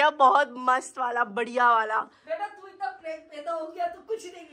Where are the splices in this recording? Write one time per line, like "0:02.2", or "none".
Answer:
none

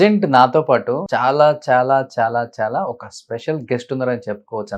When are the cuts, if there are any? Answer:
0:01.0

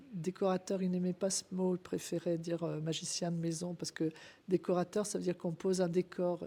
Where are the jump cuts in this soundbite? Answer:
none

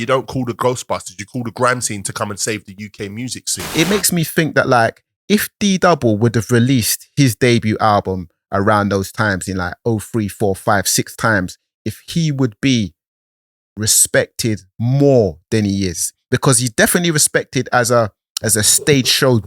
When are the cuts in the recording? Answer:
0:03.7

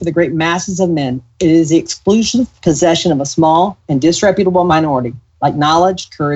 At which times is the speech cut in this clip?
0:02.5
0:04.7

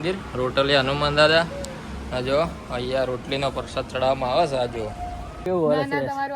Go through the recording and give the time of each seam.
0:05.3

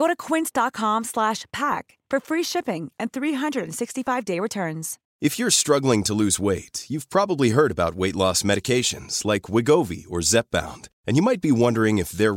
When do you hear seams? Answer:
0:05.0

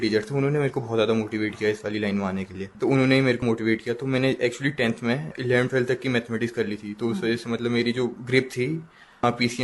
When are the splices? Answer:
0:02.6
0:03.4
0:05.3
0:08.2

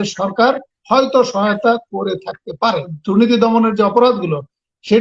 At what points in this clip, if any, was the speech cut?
0:02.9

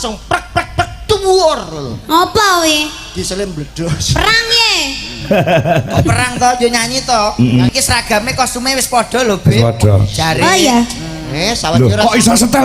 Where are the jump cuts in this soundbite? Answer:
0:07.7

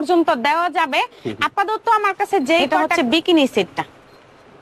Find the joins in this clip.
0:02.9

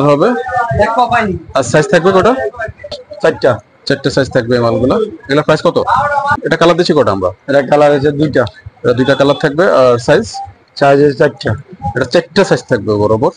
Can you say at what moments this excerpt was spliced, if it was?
0:03.1
0:06.4

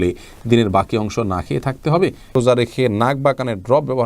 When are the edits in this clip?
0:02.3

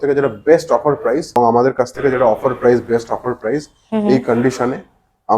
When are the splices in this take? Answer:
0:01.3

